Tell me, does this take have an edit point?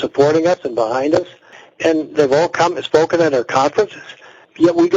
yes; 1 cut; at 1.7 s

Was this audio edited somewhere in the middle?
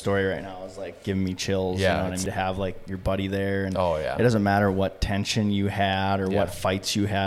yes; 1 cut; at 2.3 s

